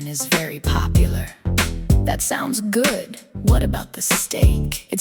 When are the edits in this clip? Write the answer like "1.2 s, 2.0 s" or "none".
none